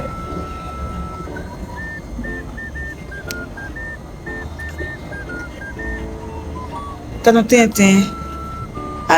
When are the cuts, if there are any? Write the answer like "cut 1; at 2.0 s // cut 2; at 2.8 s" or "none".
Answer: cut 1; at 1.0 s